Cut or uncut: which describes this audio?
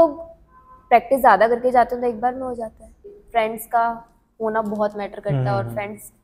cut